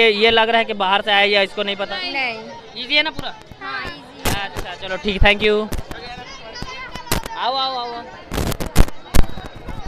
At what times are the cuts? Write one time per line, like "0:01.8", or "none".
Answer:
none